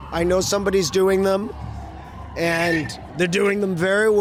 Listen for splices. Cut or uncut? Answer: uncut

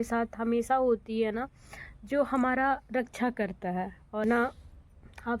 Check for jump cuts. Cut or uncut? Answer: cut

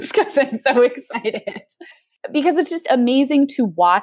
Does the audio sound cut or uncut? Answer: cut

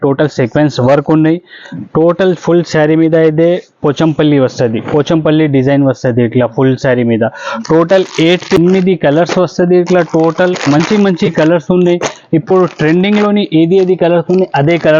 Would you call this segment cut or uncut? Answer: cut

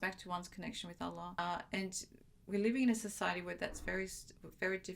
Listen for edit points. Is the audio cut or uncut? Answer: cut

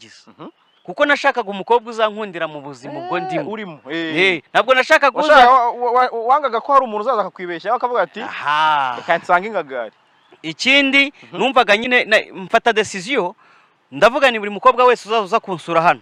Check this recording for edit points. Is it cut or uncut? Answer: uncut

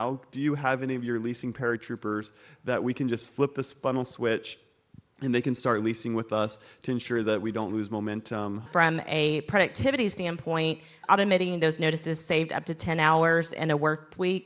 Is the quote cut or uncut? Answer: cut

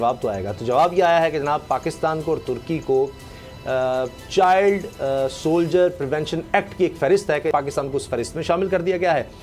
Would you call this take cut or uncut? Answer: cut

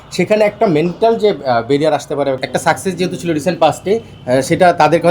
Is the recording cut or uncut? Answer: cut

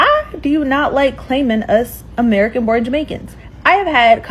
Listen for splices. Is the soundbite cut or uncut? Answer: uncut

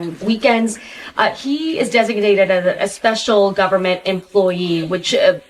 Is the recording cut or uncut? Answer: uncut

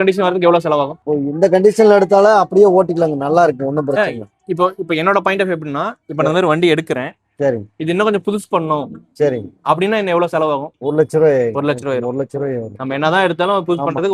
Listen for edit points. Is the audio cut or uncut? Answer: uncut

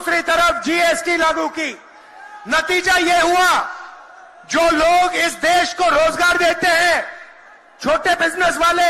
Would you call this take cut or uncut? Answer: uncut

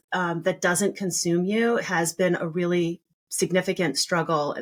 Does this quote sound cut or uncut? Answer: uncut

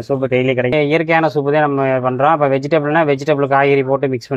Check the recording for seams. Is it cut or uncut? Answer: uncut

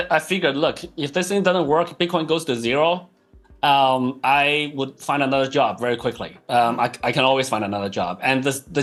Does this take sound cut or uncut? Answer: uncut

